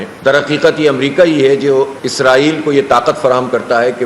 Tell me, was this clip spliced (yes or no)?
no